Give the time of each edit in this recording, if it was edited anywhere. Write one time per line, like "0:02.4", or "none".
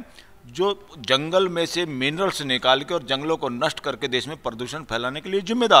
none